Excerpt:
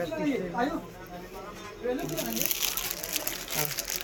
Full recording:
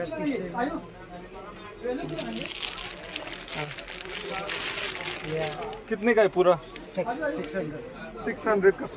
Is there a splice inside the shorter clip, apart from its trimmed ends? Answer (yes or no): no